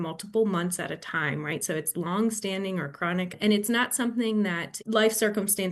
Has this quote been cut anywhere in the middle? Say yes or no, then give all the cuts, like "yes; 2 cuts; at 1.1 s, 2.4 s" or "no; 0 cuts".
yes; 2 cuts; at 3.3 s, 4.7 s